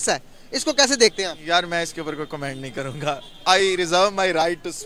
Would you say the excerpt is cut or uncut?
uncut